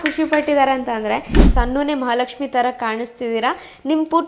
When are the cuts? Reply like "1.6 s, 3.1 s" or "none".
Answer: 1.3 s

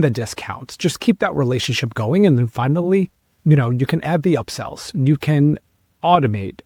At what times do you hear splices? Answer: none

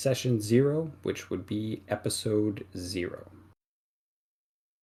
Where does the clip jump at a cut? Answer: none

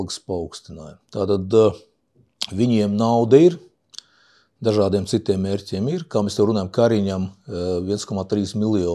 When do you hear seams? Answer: none

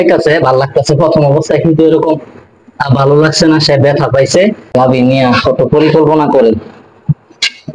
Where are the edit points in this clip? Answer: 4.7 s

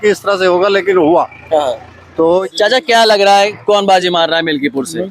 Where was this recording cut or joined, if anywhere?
2.4 s

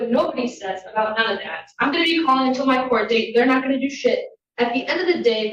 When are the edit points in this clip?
none

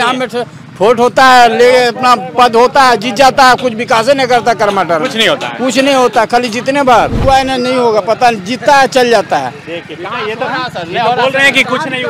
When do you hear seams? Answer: 7.2 s

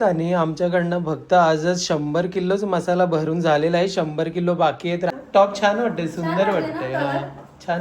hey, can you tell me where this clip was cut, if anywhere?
5.1 s

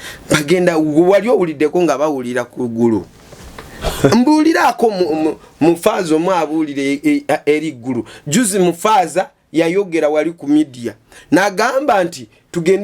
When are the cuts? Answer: none

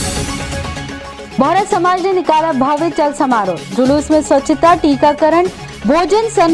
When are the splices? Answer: 1.3 s

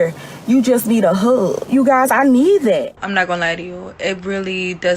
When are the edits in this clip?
1.7 s, 3.0 s

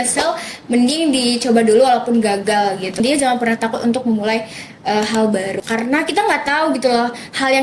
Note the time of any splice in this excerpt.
3.0 s, 5.6 s

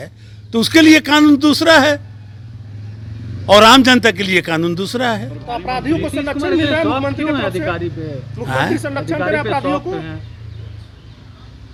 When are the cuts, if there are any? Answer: none

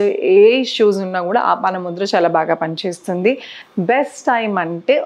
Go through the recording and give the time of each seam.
none

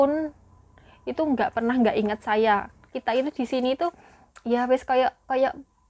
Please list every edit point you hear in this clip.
2.8 s

